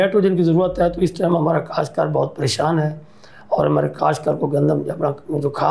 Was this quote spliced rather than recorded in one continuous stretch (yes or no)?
no